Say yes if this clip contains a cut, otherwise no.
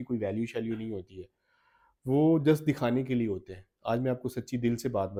no